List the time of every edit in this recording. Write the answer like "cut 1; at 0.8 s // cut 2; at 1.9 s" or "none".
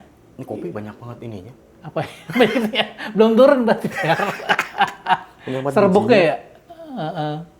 none